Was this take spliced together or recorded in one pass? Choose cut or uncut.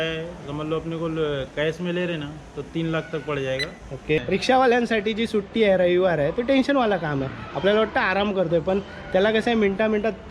cut